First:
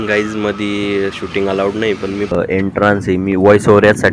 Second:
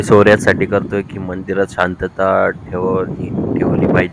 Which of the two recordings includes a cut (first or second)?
first